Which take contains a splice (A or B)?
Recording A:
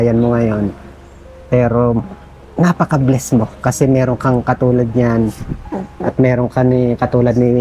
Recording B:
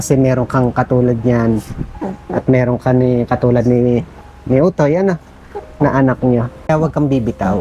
B